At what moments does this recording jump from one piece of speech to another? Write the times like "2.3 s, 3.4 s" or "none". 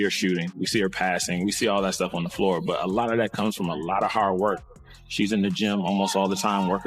none